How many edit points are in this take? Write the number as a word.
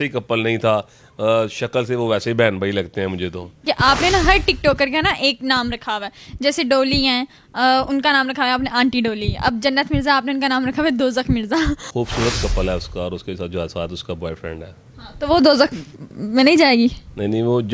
two